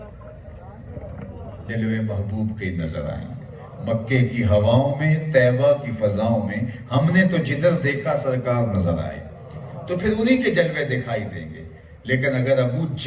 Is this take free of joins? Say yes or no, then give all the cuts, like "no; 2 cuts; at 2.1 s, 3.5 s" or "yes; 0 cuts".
no; 1 cut; at 1.7 s